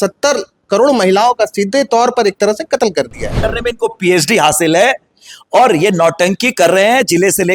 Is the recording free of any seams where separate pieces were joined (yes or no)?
no